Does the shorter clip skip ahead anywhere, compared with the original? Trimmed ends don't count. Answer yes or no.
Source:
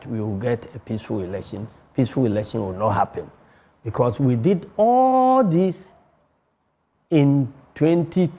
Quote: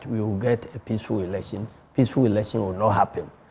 no